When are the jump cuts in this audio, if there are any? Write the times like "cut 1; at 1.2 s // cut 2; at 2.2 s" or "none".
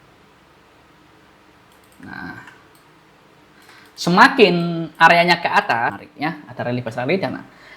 cut 1; at 6.0 s